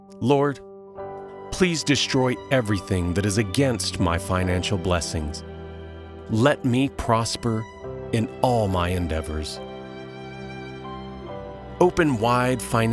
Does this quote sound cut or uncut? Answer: cut